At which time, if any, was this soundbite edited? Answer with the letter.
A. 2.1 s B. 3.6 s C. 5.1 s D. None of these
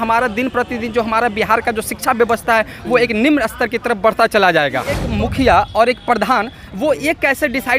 C